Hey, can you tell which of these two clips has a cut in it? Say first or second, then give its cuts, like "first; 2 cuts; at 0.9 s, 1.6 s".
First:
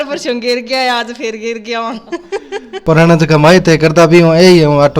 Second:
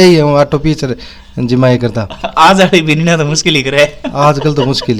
first; 1 cut; at 2.7 s